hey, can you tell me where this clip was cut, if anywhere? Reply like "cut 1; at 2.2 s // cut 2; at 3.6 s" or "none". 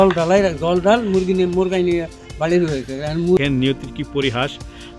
cut 1; at 3.4 s